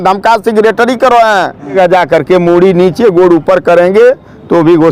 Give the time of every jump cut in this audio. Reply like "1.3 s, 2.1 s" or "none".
1.7 s

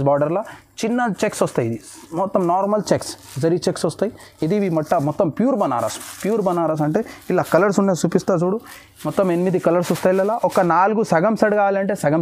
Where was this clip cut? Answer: none

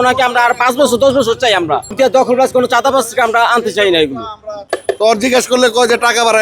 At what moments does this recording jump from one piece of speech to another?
1.9 s, 4.7 s

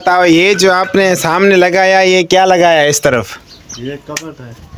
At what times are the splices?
none

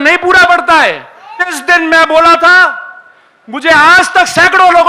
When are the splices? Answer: 1.6 s

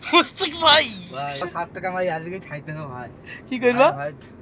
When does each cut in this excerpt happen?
1.4 s

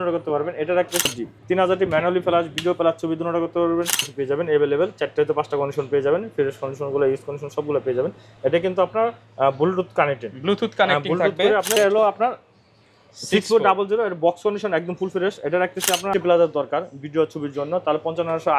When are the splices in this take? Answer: 1.0 s, 4.1 s, 11.7 s, 16.1 s

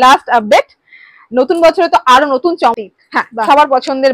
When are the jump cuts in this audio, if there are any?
2.7 s

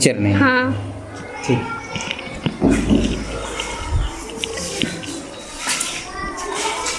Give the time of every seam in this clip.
none

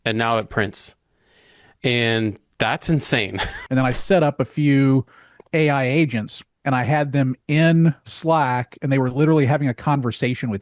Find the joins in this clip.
3.5 s

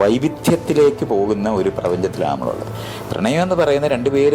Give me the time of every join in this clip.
2.7 s

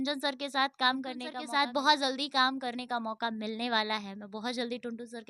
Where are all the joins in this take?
1.3 s

